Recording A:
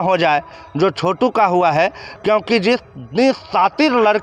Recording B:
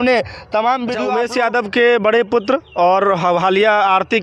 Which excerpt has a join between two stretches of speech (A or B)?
B